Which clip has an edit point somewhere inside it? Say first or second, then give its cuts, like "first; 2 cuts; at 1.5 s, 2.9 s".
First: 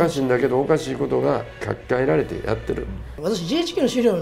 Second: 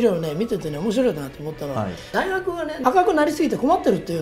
first; 2 cuts; at 1.6 s, 3.1 s